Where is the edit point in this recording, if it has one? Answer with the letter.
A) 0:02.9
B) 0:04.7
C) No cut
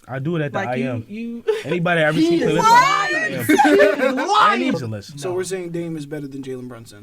B